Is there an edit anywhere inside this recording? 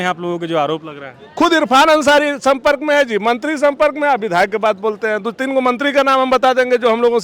no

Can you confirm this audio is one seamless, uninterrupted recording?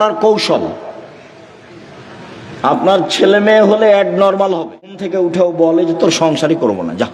no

